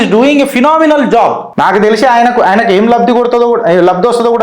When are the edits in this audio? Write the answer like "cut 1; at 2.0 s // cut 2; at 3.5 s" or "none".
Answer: cut 1; at 1.5 s